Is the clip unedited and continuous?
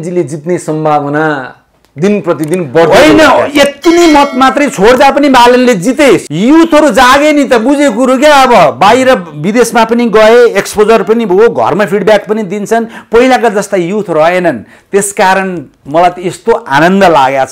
no; 1 cut; at 6.2 s

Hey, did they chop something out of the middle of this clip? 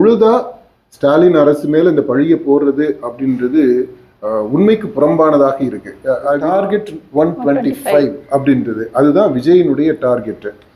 yes; 1 cut; at 6.4 s

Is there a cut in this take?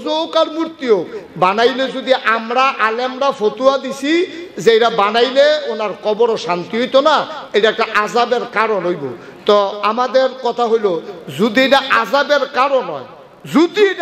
no; 0 cuts

